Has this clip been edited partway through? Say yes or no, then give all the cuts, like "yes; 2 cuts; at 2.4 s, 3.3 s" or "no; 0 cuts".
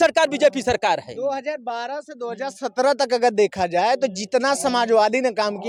no; 0 cuts